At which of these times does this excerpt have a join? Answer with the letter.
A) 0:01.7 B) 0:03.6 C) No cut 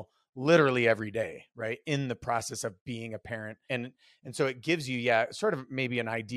B